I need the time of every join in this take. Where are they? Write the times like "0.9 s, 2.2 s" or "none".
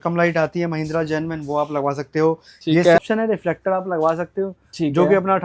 3.0 s